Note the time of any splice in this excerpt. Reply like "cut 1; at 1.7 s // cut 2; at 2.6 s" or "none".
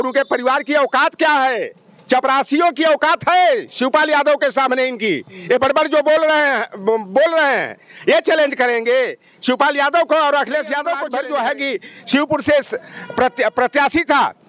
cut 1; at 11.0 s